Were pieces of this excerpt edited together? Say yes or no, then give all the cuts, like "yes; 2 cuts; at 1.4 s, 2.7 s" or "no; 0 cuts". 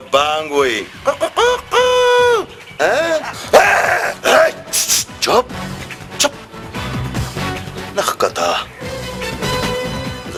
no; 0 cuts